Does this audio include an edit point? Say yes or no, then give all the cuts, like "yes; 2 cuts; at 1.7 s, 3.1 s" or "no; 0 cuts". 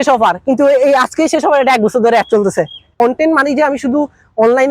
yes; 1 cut; at 2.9 s